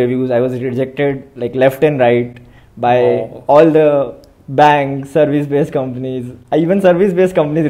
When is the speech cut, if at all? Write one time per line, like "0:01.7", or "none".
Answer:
none